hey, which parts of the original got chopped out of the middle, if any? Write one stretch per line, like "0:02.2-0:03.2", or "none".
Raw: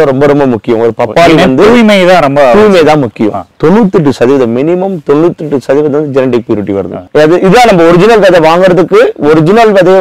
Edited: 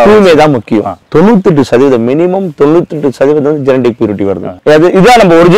none

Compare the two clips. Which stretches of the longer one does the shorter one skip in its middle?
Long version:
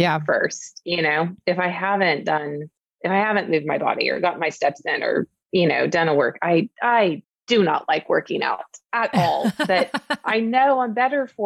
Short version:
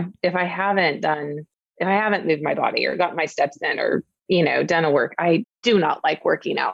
0:06.7-0:07.3

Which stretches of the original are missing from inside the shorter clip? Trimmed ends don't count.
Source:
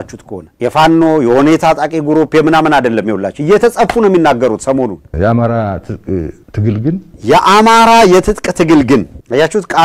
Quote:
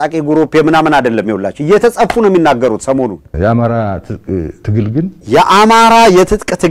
0:06.7-0:06.9

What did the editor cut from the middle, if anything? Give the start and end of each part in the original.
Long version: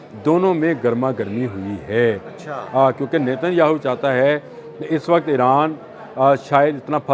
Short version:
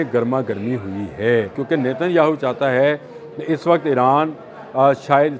0:02.3-0:03.0

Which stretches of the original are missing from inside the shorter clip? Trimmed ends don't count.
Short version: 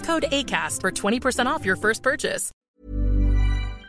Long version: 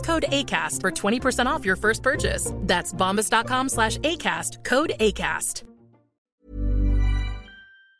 0:02.5-0:06.1

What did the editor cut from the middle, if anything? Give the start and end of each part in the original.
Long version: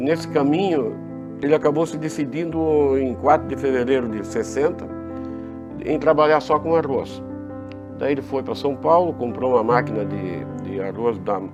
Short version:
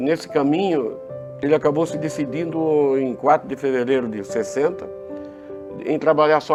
none

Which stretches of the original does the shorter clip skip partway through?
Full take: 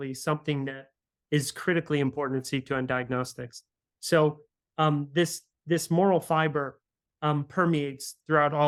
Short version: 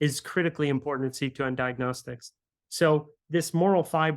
0:04.5-0:05.5

